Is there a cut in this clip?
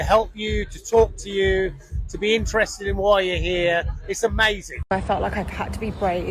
yes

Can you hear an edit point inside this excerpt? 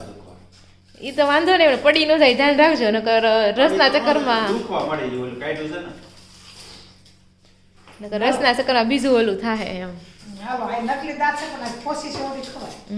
no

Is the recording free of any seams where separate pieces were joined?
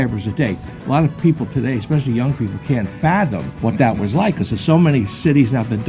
no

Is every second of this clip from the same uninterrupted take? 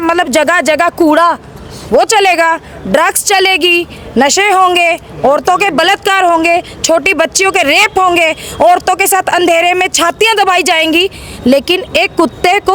yes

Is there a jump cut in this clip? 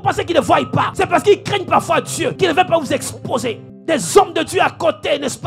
yes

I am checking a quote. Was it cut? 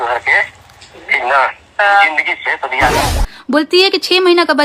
yes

